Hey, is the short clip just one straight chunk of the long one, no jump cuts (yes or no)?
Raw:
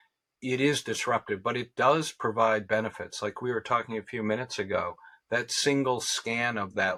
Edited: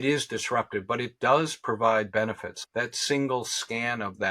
no